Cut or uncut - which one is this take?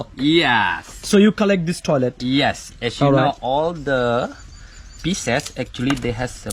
uncut